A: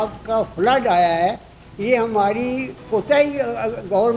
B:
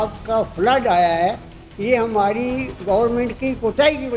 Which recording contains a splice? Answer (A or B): B